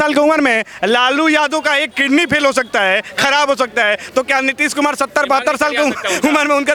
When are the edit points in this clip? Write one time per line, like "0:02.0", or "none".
none